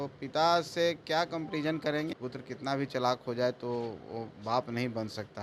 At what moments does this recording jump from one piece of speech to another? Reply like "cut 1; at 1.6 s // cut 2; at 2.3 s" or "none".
cut 1; at 2.2 s